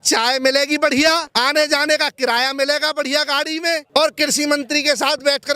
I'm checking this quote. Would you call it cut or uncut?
cut